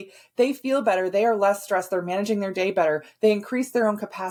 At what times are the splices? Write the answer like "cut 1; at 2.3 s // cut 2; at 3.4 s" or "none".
none